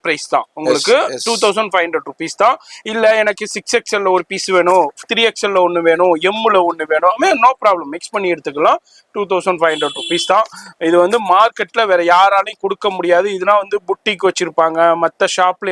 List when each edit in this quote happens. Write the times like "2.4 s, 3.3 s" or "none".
none